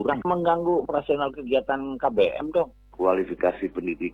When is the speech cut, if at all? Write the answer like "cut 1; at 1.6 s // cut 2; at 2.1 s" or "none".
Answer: cut 1; at 2.7 s